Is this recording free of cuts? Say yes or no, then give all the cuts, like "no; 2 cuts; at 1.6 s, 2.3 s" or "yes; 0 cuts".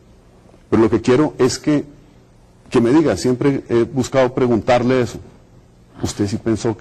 yes; 0 cuts